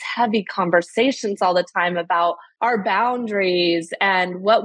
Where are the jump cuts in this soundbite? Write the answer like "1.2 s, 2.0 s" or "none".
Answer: 2.5 s